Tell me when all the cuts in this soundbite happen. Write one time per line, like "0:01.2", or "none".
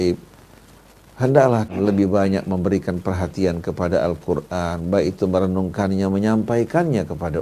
0:01.7